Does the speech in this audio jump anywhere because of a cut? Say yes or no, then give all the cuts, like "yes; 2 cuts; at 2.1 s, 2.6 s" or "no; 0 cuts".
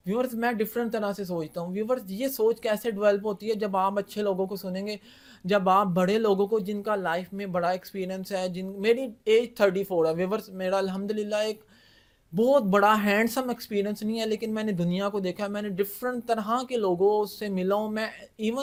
no; 0 cuts